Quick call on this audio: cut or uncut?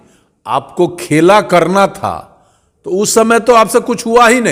uncut